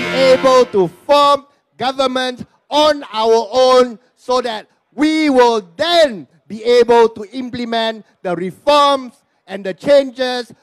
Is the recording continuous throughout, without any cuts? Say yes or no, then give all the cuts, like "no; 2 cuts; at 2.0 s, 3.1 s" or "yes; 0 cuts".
yes; 0 cuts